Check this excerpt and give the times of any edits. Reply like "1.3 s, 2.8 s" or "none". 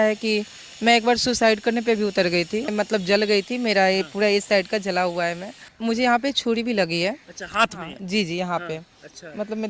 2.7 s, 5.6 s